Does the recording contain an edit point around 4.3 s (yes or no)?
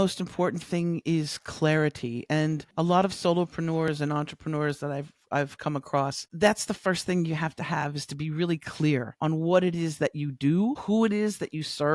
no